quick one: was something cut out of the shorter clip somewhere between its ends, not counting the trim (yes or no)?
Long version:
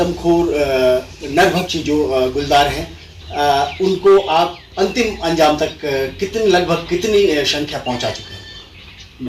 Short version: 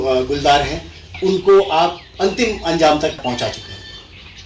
yes